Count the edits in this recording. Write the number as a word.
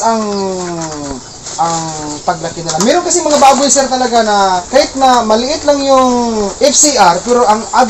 two